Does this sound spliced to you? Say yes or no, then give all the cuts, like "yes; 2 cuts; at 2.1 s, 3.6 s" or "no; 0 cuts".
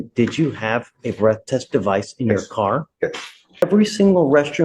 yes; 1 cut; at 3.6 s